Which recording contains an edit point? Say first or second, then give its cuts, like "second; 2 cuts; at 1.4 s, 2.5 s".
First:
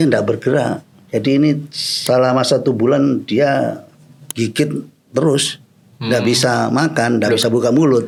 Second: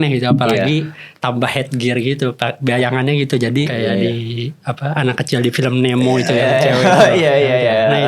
second; 1 cut; at 3.7 s